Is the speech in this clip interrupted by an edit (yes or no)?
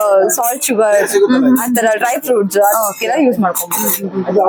no